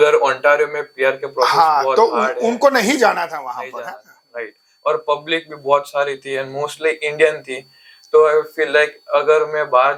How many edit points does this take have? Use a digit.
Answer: 0